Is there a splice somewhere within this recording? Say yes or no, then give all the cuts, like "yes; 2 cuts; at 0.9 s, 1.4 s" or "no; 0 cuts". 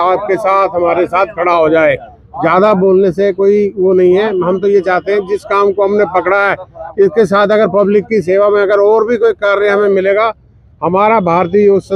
no; 0 cuts